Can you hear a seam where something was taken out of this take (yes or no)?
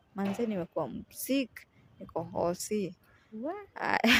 no